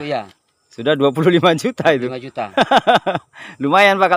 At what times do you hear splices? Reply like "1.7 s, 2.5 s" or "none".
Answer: none